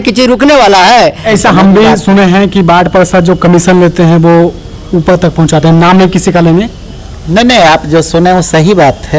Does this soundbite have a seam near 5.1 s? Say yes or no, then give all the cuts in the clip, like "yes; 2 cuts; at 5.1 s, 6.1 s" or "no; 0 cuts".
no; 1 cut; at 1.3 s